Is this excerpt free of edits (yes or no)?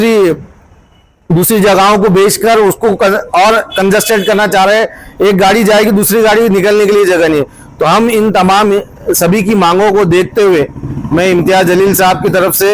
yes